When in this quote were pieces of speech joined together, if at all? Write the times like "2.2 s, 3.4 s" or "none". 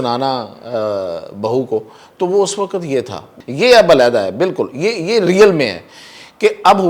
none